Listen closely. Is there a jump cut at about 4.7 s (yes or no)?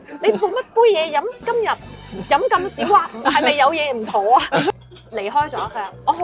yes